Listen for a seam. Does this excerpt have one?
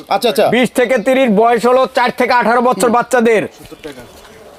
no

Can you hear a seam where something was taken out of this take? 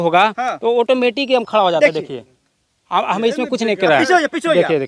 no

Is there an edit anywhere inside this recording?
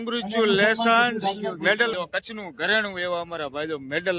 yes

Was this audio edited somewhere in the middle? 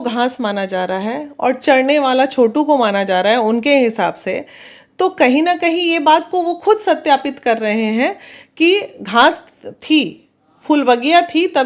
no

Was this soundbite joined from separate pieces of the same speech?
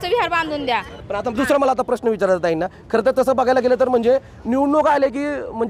no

